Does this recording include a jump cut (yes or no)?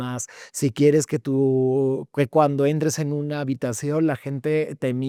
no